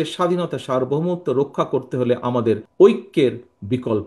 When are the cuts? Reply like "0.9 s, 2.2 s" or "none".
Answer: 2.7 s